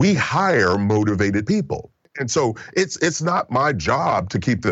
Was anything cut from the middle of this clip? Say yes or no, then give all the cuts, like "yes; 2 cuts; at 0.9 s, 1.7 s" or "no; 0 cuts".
yes; 1 cut; at 1.8 s